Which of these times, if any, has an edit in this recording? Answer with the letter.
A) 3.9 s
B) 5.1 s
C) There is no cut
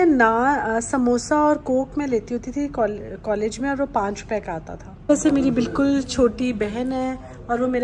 B